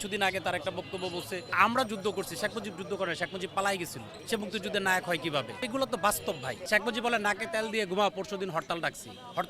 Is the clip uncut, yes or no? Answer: no